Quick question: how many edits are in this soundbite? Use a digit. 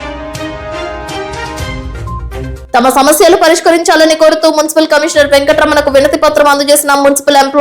1